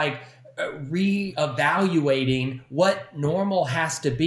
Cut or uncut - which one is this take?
cut